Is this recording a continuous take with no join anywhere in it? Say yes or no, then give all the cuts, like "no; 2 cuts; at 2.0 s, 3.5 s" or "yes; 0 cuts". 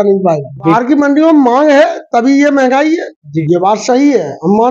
no; 2 cuts; at 0.8 s, 3.3 s